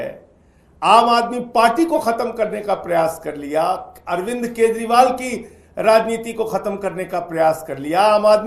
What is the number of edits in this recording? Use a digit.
0